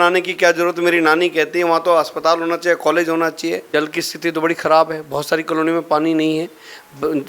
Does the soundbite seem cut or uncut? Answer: cut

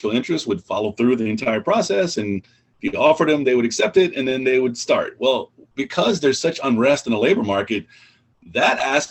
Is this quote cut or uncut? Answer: uncut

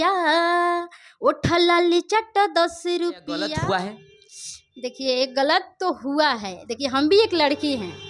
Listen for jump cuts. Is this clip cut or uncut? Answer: cut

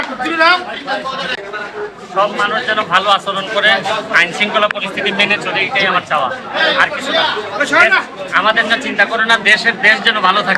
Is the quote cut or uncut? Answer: cut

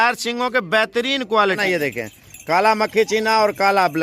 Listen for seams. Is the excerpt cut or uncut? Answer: cut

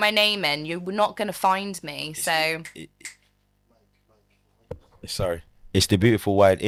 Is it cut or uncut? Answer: uncut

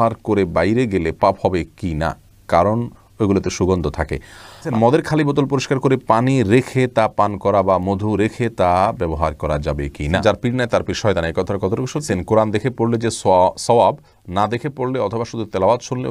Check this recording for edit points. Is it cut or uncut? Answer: cut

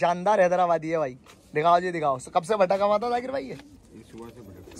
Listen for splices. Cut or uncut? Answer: uncut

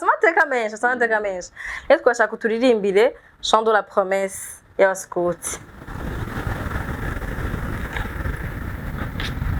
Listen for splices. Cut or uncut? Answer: uncut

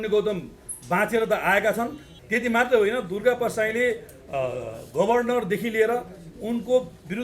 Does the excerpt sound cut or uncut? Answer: cut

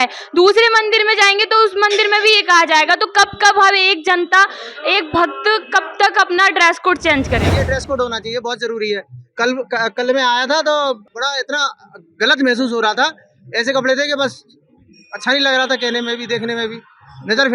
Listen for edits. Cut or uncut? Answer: cut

